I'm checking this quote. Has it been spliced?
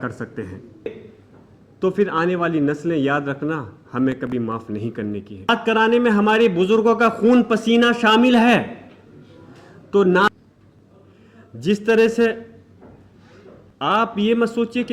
yes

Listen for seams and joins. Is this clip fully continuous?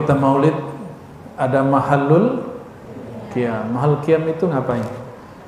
yes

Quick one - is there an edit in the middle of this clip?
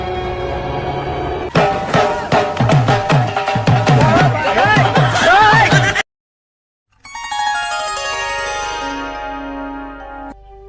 yes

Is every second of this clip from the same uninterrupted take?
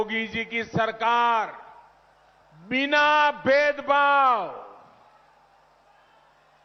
yes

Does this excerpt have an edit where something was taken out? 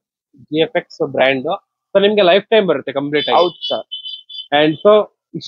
no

